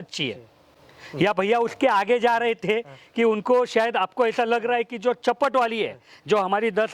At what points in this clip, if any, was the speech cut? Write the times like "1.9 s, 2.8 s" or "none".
none